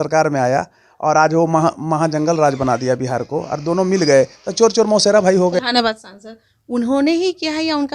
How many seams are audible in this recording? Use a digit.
1